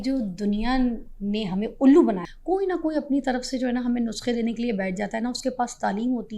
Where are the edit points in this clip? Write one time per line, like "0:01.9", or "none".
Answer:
0:02.2

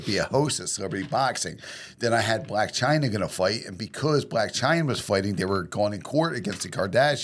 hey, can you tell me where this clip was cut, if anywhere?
none

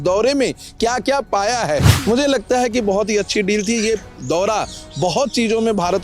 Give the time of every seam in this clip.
0:02.0

